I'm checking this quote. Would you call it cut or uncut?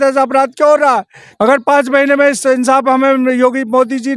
cut